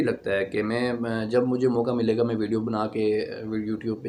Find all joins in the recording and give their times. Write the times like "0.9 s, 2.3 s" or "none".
none

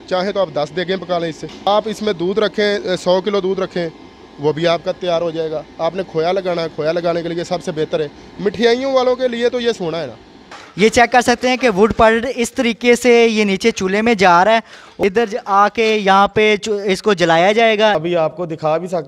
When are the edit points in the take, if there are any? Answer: 1.7 s, 10.4 s, 14.9 s, 18.0 s

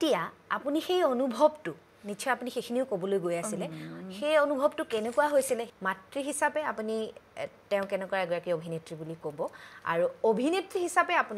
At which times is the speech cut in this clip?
5.7 s

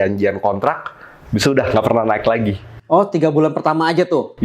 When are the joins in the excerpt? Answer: none

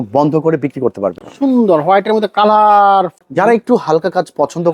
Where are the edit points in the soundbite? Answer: 1.2 s, 3.2 s

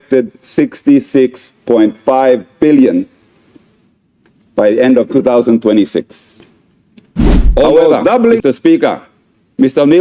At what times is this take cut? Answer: 8.4 s

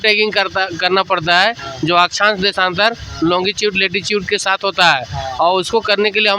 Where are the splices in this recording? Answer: none

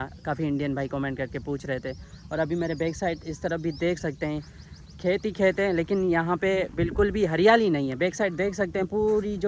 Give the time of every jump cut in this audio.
none

